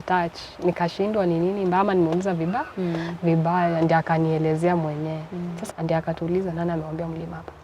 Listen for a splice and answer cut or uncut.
cut